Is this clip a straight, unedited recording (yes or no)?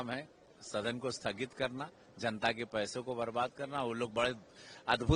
yes